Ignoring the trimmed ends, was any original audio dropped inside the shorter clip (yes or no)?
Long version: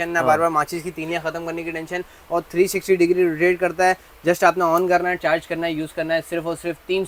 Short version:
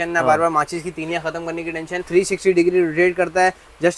yes